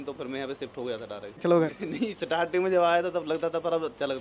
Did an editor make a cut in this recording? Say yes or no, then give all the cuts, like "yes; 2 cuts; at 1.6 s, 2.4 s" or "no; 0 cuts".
yes; 1 cut; at 1.4 s